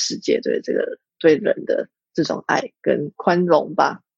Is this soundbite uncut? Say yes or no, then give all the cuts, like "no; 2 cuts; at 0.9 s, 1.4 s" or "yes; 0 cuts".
no; 1 cut; at 3.1 s